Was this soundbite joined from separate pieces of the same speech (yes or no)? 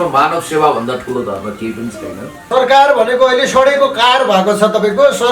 yes